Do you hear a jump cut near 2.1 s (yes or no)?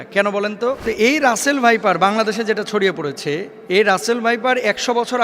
no